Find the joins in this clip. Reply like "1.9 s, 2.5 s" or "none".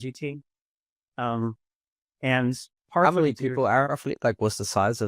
3.9 s